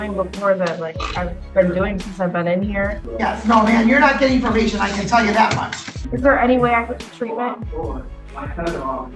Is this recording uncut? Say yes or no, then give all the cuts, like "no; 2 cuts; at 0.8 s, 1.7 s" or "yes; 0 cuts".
no; 2 cuts; at 2.9 s, 6.0 s